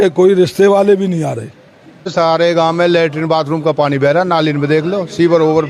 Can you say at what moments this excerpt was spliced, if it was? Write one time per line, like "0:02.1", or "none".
0:02.1